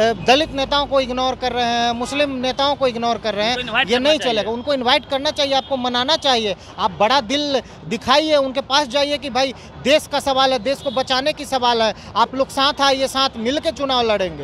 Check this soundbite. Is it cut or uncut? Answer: uncut